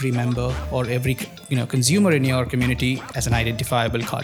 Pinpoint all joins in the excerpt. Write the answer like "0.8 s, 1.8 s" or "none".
none